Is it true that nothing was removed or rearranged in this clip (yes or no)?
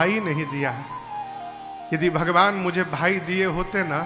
yes